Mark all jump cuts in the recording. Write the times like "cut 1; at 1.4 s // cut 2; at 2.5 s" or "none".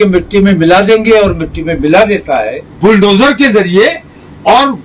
cut 1; at 2.6 s